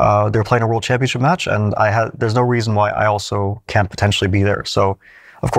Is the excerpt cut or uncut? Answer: uncut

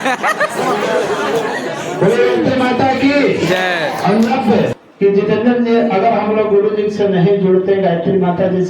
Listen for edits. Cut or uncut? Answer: cut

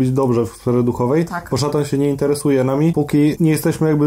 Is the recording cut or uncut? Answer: cut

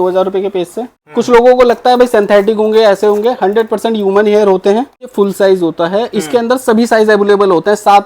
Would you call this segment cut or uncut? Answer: cut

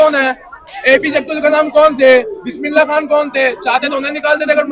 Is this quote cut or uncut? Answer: uncut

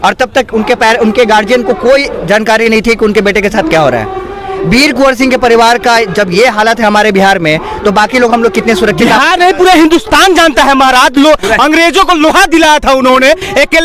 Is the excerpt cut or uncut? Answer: uncut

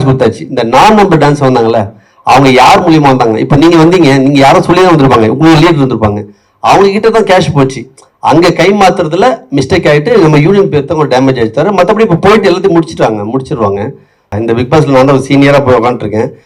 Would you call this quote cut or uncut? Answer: cut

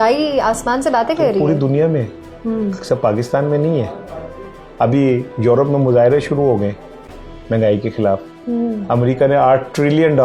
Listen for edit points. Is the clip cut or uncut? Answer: uncut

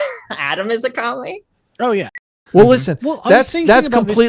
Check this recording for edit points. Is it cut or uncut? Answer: cut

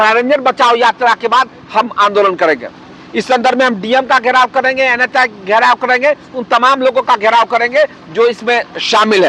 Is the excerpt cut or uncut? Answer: uncut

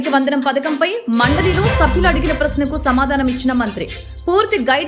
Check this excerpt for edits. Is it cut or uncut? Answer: uncut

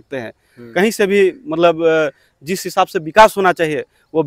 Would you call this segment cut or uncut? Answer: uncut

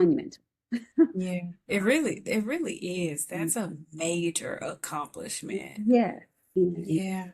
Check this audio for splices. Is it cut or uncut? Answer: cut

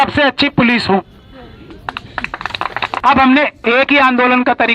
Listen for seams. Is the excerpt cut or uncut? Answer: cut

